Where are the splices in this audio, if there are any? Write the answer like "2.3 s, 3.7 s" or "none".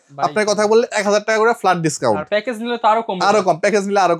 none